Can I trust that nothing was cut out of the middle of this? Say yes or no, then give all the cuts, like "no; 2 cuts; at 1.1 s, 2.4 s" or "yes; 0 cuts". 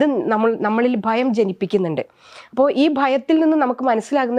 yes; 0 cuts